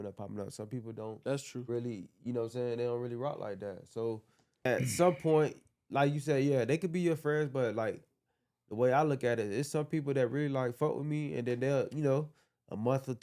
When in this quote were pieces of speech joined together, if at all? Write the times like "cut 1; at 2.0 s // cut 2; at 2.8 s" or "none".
cut 1; at 4.7 s